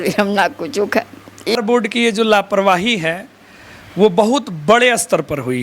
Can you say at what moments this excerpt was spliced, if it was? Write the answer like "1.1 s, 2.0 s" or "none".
1.5 s